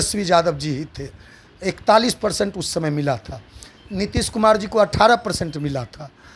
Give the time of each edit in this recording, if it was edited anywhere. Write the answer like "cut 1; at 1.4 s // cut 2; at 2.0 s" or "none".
none

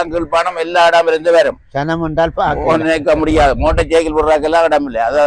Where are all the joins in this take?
none

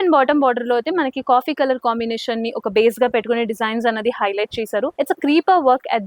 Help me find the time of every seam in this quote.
none

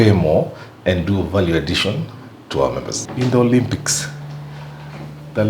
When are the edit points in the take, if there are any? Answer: cut 1; at 3.0 s

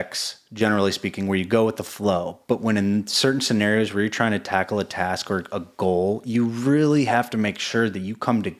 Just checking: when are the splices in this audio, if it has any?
none

